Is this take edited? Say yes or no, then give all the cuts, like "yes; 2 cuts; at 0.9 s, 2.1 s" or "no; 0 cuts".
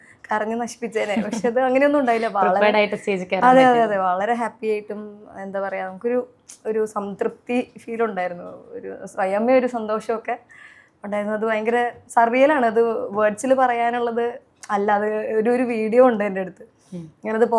no; 0 cuts